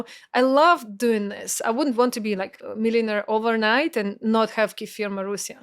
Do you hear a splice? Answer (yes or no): yes